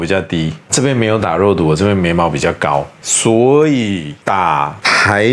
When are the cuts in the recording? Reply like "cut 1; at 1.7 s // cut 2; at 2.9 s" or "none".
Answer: cut 1; at 3.0 s // cut 2; at 4.5 s